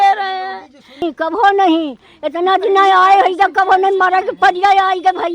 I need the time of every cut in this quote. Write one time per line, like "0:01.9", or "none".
0:01.0